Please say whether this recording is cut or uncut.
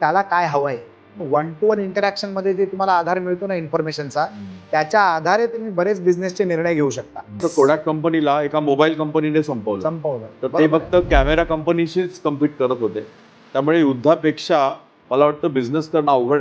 cut